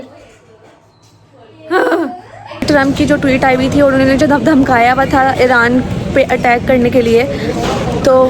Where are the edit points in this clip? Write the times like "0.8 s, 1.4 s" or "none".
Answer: 2.6 s